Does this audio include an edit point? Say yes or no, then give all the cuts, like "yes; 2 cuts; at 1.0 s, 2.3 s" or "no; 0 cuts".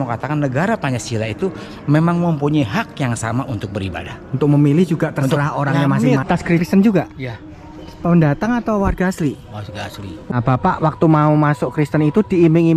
yes; 1 cut; at 6.6 s